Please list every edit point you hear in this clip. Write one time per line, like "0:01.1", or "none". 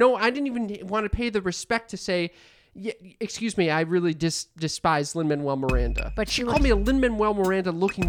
none